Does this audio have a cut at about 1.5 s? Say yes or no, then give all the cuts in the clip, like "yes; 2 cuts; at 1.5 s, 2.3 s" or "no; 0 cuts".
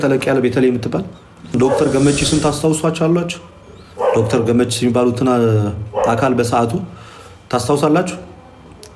yes; 1 cut; at 1.5 s